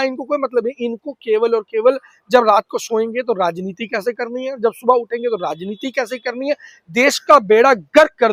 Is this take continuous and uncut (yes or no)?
yes